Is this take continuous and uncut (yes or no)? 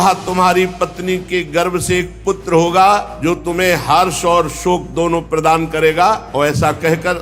no